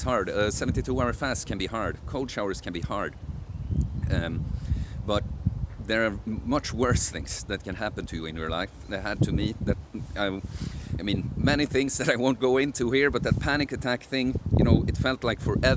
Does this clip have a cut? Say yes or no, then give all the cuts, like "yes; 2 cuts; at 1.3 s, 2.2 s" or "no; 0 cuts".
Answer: no; 0 cuts